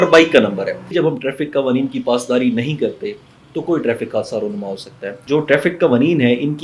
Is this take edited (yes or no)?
yes